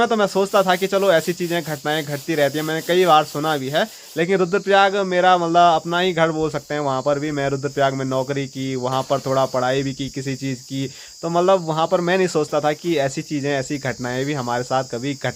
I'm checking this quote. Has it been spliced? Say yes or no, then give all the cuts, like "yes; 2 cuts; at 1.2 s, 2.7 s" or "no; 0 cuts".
no; 0 cuts